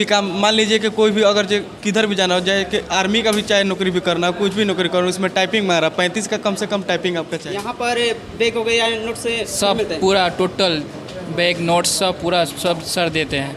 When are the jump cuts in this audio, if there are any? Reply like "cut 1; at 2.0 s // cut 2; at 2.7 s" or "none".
cut 1; at 7.4 s